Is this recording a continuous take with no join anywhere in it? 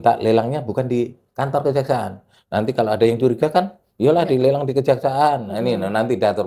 yes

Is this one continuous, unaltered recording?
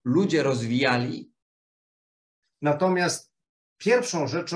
no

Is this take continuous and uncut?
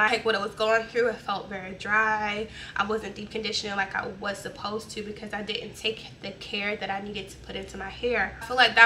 yes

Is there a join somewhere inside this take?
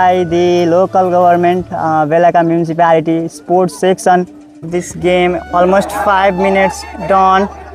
yes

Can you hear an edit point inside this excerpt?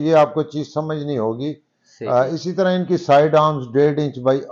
no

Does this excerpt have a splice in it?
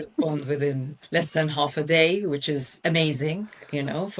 yes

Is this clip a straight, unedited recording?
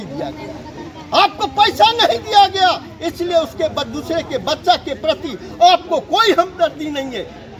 yes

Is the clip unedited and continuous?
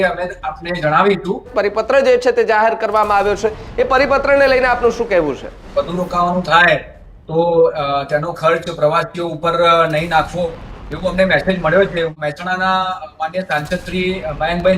no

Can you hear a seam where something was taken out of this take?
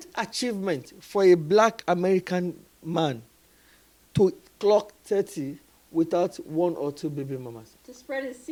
no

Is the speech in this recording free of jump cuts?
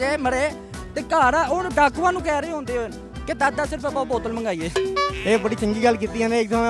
yes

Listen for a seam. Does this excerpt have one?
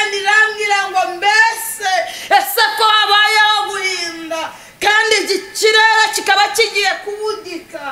no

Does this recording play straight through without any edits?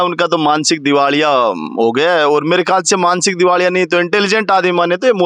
yes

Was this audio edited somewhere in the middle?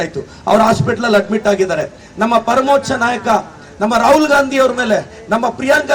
no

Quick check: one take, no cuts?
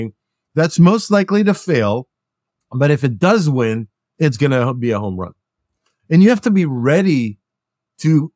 no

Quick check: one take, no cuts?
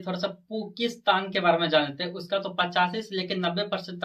yes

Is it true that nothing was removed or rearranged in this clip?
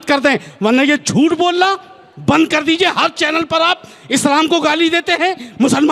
yes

